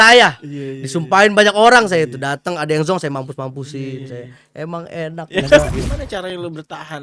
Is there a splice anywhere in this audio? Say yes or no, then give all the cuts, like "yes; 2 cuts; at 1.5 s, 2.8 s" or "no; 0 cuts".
yes; 1 cut; at 5.6 s